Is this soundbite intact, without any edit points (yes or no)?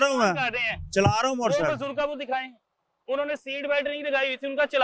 yes